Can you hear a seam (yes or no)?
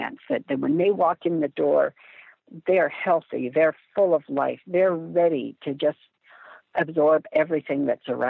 no